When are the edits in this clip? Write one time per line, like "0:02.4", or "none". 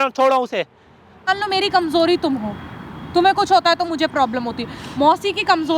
0:01.3